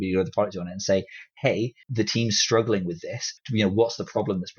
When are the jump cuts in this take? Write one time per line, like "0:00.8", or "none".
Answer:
0:01.8
0:03.3

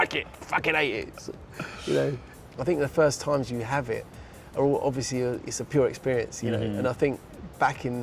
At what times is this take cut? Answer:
0:02.3

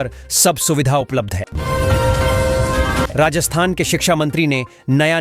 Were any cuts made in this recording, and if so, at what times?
0:01.5
0:03.1

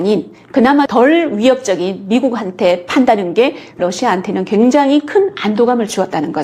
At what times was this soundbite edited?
none

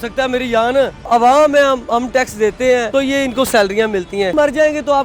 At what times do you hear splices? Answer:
0:01.0
0:02.9
0:04.3

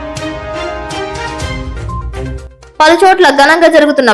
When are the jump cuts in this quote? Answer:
0:01.5

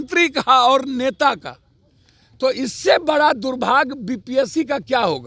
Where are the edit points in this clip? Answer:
none

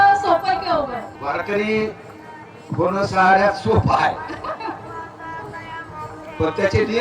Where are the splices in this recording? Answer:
0:01.1

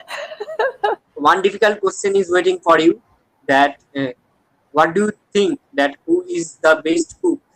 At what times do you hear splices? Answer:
0:01.0

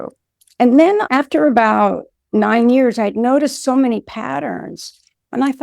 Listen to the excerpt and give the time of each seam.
0:01.1

